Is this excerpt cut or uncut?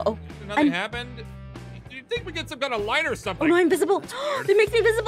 uncut